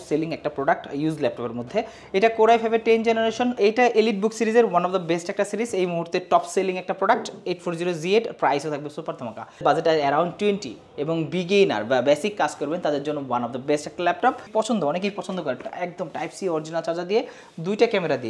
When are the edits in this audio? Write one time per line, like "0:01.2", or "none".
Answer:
0:03.6
0:09.6
0:14.4